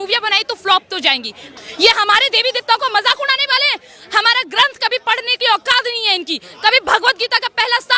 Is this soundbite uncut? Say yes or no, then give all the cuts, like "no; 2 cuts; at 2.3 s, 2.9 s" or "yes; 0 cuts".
no; 1 cut; at 1.5 s